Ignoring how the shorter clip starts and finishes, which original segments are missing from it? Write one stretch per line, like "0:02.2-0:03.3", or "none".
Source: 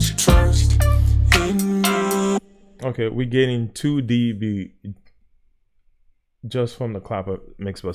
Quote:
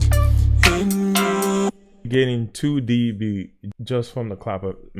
0:02.7-0:03.2
0:04.9-0:06.3